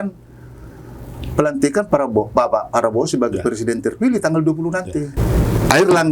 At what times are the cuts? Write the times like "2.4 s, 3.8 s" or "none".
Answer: 5.1 s